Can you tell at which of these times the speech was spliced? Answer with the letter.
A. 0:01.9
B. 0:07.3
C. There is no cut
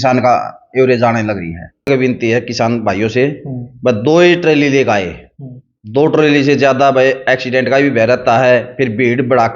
A